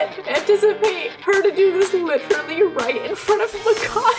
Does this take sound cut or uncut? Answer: uncut